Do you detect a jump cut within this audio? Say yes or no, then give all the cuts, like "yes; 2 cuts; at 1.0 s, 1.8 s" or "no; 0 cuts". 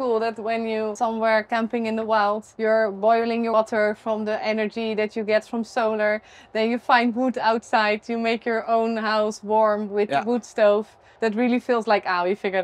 yes; 4 cuts; at 0.9 s, 2.5 s, 3.5 s, 11.0 s